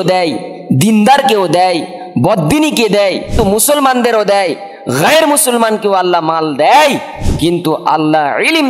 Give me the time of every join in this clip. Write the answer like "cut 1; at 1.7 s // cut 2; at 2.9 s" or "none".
cut 1; at 3.3 s